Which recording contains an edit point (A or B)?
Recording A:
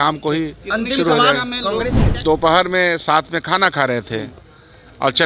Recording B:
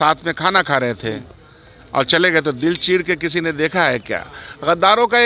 A